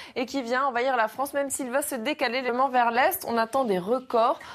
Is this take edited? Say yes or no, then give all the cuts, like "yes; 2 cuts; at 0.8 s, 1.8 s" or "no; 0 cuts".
no; 0 cuts